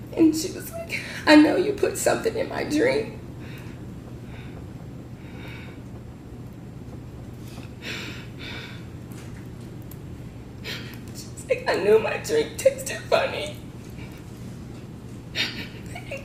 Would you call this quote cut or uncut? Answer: uncut